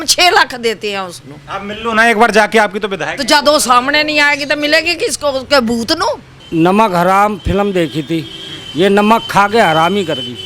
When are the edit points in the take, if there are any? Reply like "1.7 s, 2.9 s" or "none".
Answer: 6.4 s